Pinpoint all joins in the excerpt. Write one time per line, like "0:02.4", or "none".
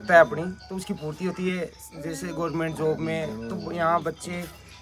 none